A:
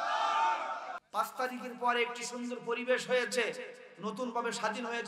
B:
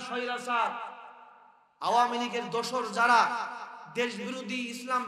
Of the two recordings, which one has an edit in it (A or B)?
A